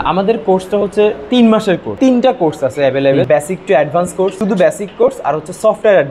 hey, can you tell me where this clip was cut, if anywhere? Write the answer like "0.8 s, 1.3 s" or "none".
1.9 s, 3.3 s, 4.4 s